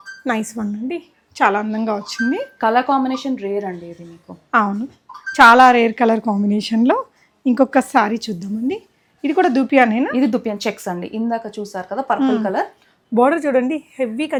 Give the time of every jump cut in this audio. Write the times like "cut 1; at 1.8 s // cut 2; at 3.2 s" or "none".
none